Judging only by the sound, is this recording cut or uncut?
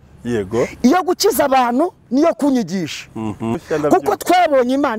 cut